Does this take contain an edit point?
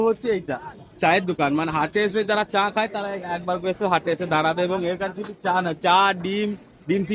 no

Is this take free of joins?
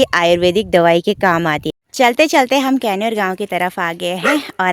no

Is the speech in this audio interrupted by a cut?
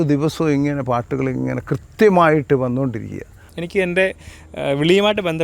yes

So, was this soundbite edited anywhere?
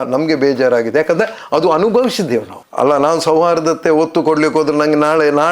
yes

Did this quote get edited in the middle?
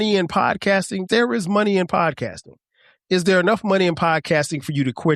yes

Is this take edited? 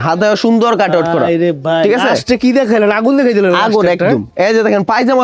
no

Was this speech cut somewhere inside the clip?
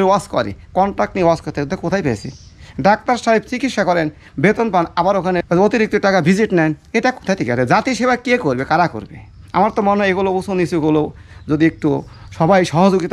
no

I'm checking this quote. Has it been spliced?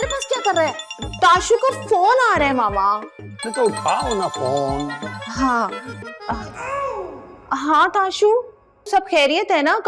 no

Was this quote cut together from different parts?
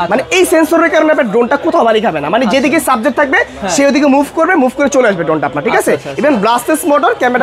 no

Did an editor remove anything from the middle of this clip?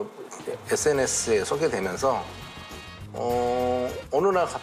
no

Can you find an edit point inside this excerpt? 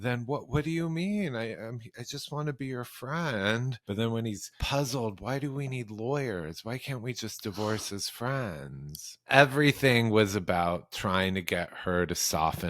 yes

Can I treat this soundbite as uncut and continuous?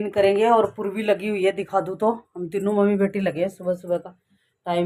yes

